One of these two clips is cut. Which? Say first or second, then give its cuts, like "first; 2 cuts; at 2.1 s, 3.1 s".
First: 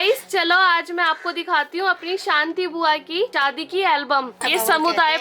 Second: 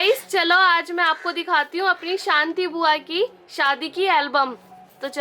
first; 2 cuts; at 3.3 s, 4.4 s